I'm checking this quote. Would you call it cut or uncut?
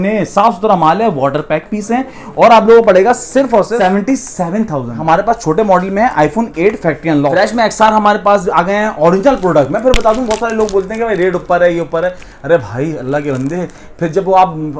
cut